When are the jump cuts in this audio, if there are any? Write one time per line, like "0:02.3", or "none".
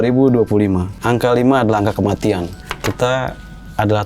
0:00.9
0:02.6